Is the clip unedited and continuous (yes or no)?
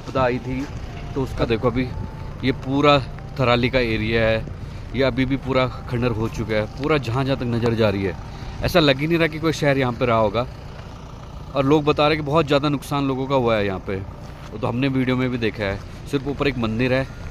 yes